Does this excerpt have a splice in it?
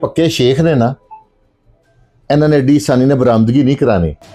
no; 0 cuts

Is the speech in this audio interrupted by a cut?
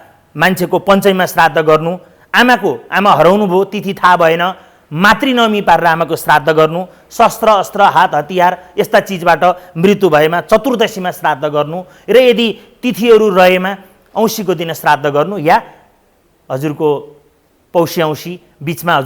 no; 0 cuts

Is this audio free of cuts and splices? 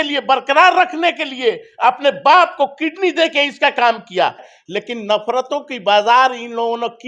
no; 1 cut; at 4.4 s

